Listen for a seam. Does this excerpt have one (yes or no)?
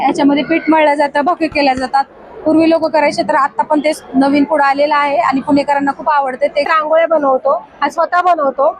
yes